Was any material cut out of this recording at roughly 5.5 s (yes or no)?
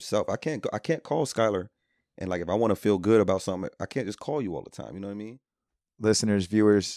yes